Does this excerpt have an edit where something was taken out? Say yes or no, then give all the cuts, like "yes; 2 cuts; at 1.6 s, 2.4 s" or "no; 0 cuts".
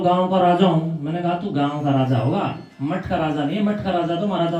no; 0 cuts